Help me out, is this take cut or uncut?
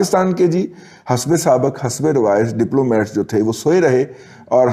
uncut